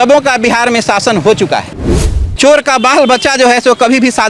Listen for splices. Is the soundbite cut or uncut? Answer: cut